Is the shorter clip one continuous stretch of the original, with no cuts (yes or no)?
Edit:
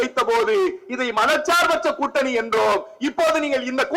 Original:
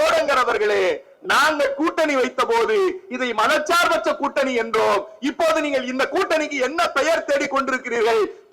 yes